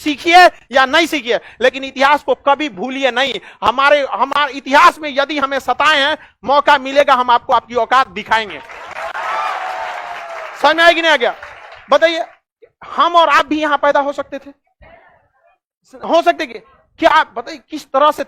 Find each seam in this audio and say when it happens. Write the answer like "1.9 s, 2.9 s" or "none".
none